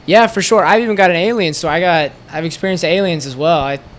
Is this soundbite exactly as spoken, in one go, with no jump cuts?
yes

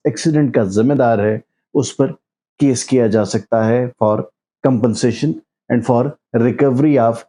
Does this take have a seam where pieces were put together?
no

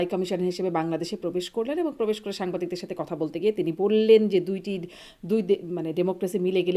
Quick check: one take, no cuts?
yes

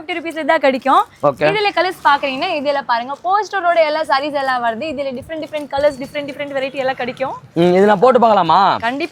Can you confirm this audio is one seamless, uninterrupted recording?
yes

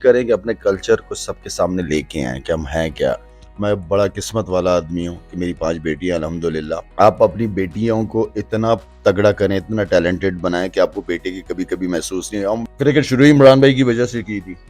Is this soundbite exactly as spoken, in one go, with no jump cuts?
no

